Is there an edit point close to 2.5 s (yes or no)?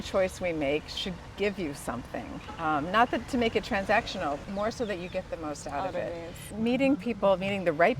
no